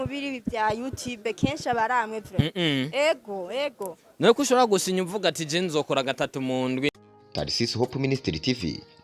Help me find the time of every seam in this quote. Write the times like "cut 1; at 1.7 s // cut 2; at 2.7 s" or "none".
cut 1; at 6.9 s